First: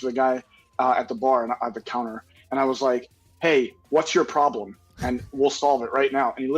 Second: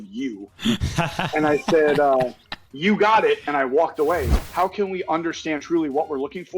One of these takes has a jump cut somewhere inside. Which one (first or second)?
second